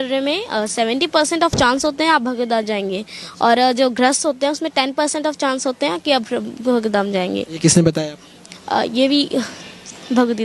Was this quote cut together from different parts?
no; 0 cuts

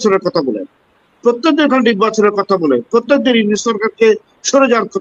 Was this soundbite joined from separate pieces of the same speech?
no; 0 cuts

